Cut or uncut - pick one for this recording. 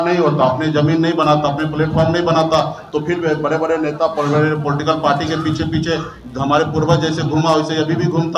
uncut